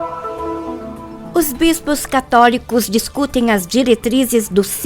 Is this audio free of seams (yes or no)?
no